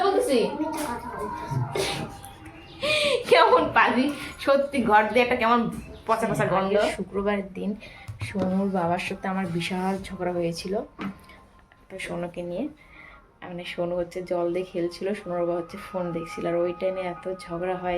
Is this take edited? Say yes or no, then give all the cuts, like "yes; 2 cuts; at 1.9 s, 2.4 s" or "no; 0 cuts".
yes; 1 cut; at 7.0 s